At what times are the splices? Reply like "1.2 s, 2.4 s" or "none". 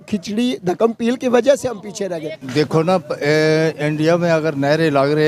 2.4 s